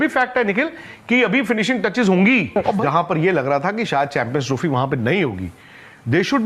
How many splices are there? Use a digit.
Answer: 1